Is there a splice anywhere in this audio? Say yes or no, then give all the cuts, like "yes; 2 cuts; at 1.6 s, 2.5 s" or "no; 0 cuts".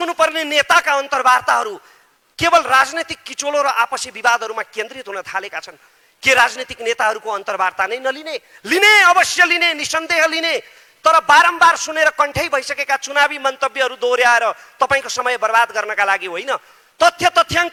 no; 0 cuts